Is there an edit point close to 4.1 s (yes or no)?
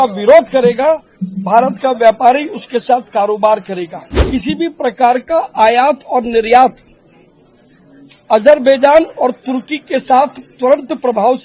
yes